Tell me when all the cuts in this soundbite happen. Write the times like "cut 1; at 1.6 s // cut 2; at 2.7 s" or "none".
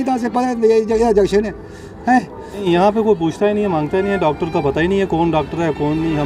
cut 1; at 2.6 s